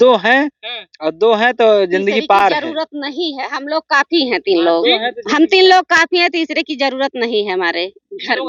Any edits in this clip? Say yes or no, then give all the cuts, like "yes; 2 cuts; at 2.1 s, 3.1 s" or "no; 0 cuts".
no; 0 cuts